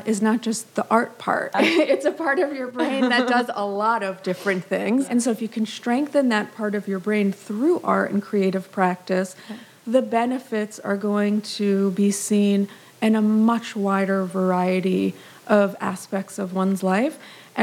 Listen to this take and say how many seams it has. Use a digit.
2